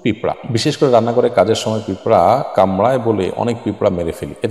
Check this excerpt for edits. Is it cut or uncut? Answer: uncut